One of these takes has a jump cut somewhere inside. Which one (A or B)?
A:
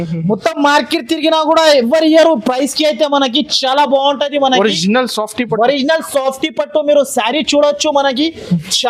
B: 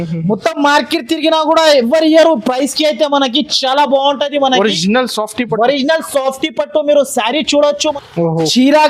B